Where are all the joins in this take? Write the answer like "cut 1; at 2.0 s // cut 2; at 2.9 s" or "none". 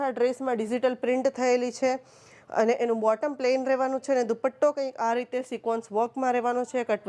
none